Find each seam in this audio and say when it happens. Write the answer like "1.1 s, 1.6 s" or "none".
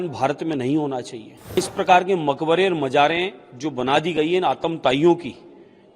1.6 s